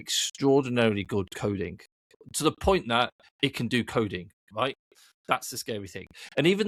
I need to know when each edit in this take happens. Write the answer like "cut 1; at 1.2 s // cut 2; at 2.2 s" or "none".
none